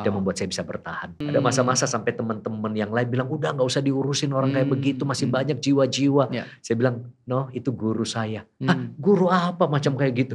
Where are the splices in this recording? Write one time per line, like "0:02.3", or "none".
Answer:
0:01.2